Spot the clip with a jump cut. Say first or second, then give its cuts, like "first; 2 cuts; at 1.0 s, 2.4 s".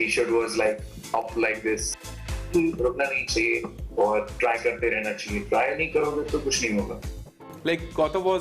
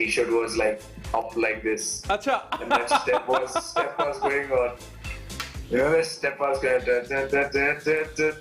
first; 2 cuts; at 2.1 s, 7.2 s